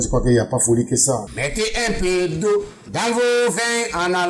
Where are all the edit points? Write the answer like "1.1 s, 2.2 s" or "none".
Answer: 1.3 s